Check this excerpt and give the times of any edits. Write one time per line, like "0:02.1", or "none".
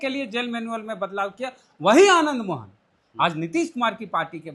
none